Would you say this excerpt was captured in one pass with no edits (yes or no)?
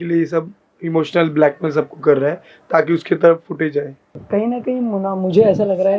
no